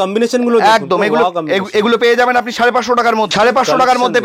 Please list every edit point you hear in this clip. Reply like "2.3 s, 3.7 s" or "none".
3.3 s